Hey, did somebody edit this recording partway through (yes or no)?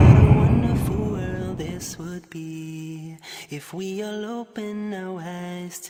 no